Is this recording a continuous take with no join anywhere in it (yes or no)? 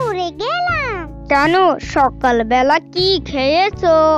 no